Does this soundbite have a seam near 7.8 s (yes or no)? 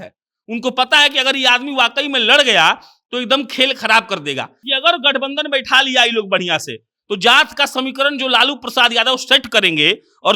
no